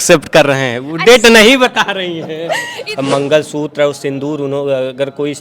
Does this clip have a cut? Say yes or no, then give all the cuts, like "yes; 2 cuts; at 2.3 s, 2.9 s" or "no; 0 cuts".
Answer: yes; 1 cut; at 2.7 s